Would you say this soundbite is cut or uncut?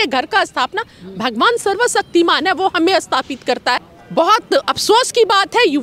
cut